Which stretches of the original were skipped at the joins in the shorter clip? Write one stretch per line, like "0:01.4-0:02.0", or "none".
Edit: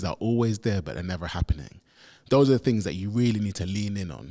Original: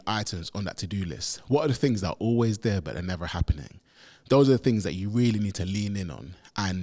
none

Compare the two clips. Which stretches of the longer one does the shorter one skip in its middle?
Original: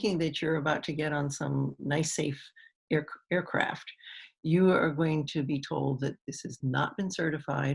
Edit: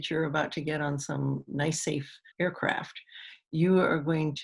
0:02.6-0:03.2

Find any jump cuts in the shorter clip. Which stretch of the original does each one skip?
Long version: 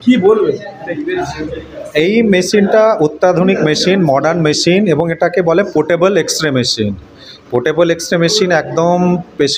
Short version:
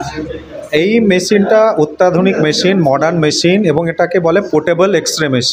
none

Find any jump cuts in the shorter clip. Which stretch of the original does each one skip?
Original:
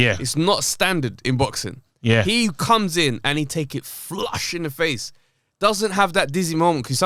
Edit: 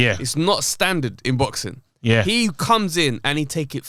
none

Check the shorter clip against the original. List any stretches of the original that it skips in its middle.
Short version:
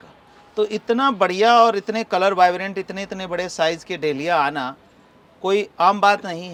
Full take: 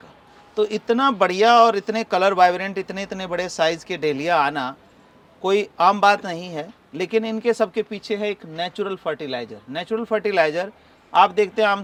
none

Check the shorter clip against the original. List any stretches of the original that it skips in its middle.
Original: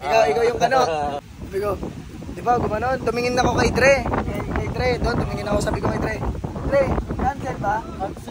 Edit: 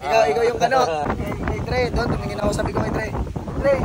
0:01.1-0:04.1

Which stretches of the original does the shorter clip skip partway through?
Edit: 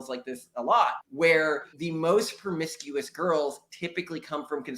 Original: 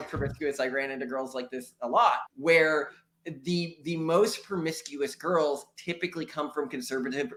0:03.0-0:03.8

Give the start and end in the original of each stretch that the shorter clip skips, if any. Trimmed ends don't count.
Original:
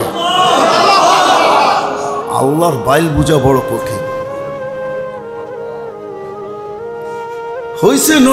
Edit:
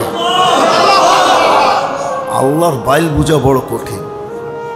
0:03.7-0:06.2

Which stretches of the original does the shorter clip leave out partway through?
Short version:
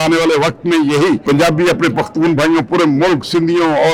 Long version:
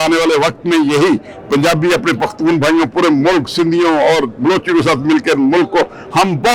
0:01.2-0:01.5

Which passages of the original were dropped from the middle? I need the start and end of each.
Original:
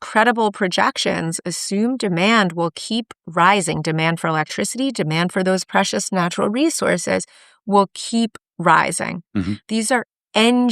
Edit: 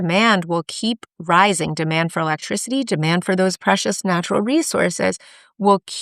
none

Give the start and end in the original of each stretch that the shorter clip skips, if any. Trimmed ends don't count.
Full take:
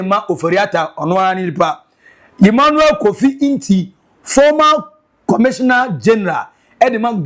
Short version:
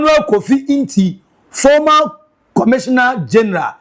none

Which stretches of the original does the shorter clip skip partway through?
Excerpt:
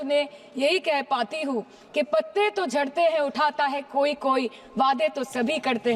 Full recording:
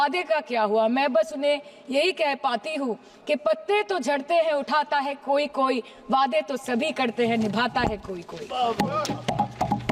none

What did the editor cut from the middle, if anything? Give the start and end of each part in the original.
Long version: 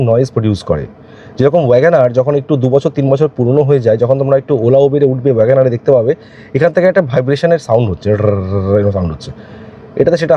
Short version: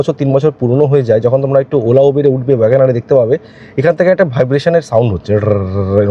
none

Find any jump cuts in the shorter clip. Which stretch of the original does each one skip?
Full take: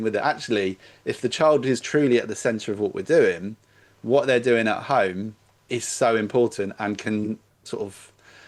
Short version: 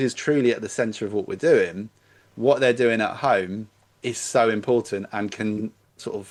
none

